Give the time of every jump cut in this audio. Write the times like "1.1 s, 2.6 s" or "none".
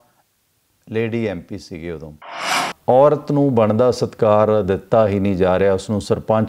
2.6 s